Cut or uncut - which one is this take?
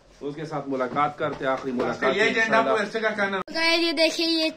cut